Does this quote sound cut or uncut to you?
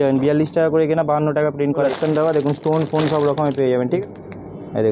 cut